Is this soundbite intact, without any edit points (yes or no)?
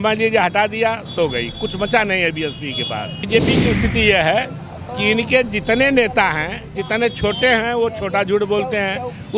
no